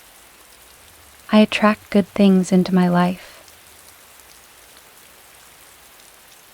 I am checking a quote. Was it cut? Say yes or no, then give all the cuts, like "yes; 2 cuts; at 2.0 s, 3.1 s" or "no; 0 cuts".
yes; 2 cuts; at 1.3 s, 3.4 s